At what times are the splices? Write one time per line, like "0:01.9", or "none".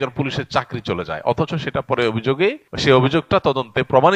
0:02.7